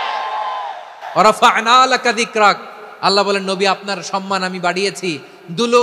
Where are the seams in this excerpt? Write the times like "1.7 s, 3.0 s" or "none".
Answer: none

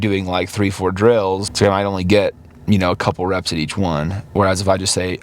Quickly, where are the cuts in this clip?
1.5 s

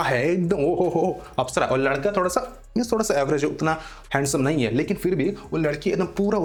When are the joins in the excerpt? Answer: none

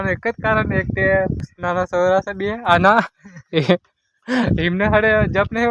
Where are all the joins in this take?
1.5 s

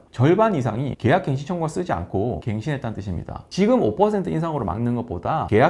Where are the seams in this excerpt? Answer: 0.9 s, 2.4 s, 3.4 s

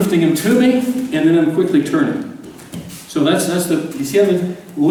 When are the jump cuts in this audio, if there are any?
none

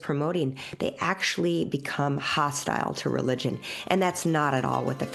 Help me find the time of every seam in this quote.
none

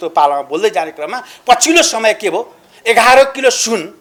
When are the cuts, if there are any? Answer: none

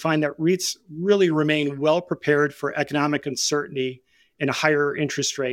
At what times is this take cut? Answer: none

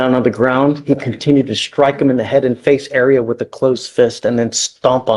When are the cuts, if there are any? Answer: none

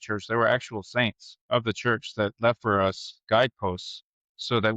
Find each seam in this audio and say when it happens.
1.3 s, 3.2 s

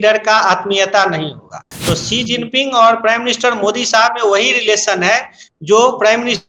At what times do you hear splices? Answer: 1.7 s

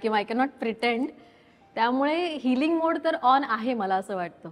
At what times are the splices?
none

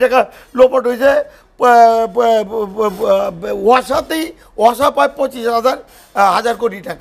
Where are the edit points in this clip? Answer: none

